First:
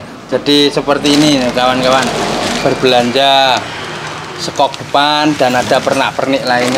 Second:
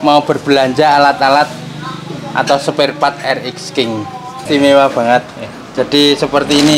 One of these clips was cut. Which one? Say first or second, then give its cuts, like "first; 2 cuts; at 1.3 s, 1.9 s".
second; 1 cut; at 4.4 s